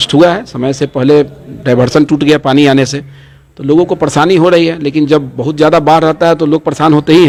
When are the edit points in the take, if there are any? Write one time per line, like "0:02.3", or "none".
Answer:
none